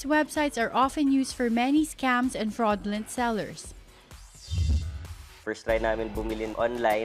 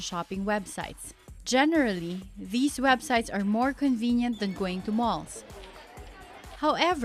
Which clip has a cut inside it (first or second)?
second